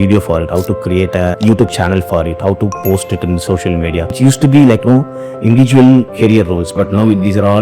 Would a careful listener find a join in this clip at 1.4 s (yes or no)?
yes